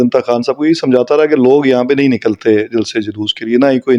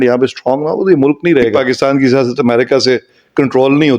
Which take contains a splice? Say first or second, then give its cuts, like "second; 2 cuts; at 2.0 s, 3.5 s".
second; 1 cut; at 1.6 s